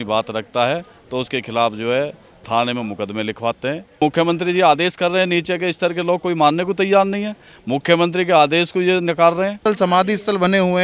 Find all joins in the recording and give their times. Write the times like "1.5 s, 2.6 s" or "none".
4.0 s, 9.6 s